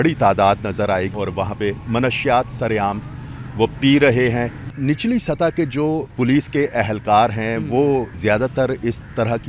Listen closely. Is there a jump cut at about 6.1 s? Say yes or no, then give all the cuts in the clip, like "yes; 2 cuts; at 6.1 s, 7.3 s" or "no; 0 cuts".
yes; 4 cuts; at 1.1 s, 4.7 s, 6.1 s, 8.1 s